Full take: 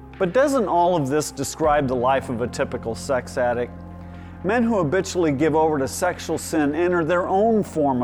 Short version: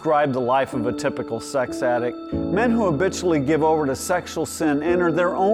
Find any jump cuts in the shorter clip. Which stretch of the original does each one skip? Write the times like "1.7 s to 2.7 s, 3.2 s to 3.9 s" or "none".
3.9 s to 4.2 s